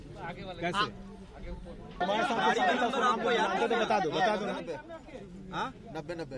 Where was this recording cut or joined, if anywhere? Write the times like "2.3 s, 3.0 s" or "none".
2.0 s